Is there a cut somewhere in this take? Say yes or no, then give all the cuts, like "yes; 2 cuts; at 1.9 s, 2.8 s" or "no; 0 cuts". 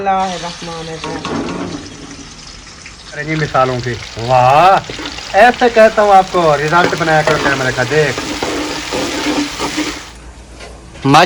yes; 2 cuts; at 3.2 s, 10.1 s